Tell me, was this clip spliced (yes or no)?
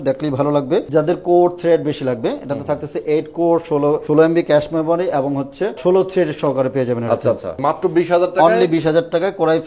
yes